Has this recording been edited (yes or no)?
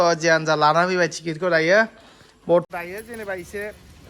yes